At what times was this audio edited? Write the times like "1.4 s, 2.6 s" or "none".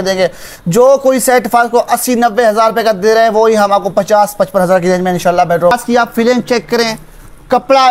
5.7 s